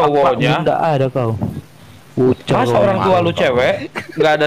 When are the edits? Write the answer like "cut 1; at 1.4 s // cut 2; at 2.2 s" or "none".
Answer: none